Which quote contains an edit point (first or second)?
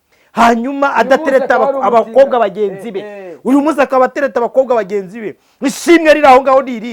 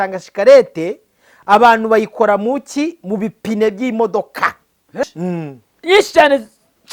second